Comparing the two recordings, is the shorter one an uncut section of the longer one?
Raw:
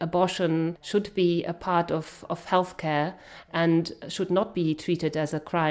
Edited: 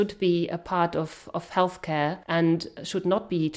no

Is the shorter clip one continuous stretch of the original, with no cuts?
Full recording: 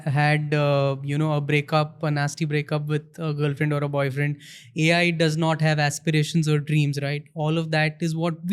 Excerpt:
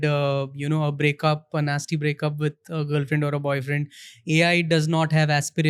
yes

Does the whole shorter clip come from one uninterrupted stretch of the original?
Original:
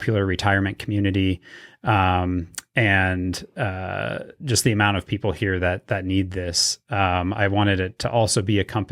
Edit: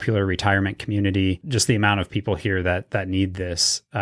no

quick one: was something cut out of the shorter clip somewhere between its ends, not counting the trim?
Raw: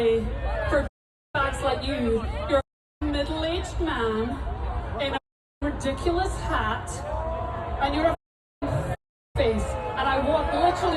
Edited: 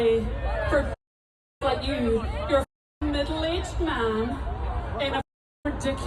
no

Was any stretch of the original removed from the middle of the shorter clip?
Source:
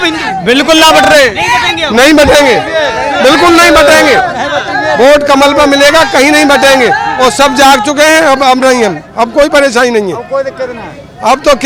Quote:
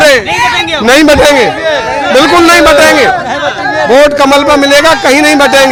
no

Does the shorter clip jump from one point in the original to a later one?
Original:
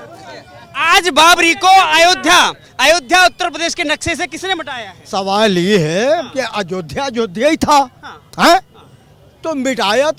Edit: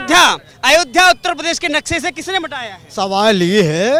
no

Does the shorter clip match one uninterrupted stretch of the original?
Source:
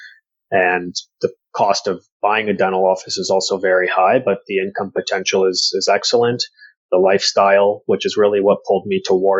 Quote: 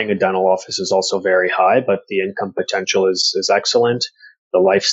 yes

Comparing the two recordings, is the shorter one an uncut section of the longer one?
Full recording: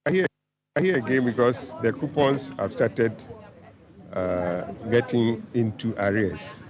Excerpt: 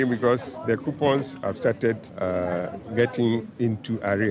no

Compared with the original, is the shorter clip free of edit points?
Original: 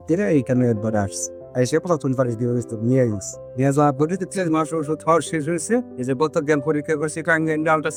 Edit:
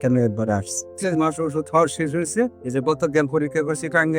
no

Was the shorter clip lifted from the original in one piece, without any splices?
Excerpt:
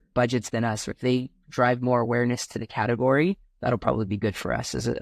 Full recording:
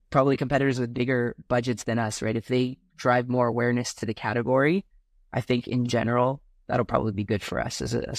no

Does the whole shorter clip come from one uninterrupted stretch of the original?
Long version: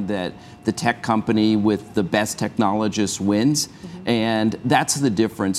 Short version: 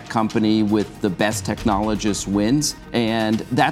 no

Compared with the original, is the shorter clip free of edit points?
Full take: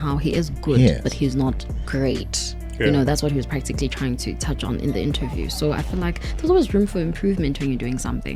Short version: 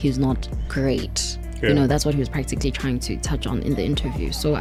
yes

